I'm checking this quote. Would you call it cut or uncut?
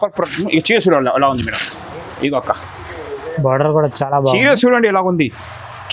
uncut